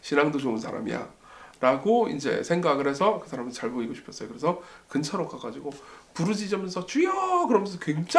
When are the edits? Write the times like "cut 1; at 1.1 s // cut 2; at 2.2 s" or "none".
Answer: none